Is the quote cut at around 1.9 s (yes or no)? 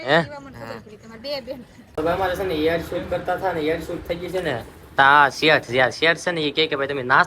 yes